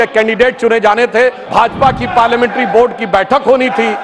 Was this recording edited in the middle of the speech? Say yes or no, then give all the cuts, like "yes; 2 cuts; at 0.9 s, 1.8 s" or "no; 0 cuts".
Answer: yes; 1 cut; at 1.4 s